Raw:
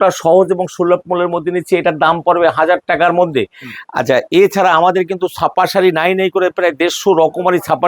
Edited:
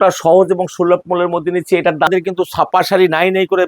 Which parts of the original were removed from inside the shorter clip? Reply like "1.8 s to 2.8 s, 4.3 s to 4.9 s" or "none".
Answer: 2.1 s to 4.9 s